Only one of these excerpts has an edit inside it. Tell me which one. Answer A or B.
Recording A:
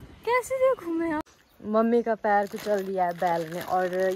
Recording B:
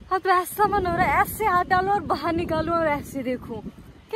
A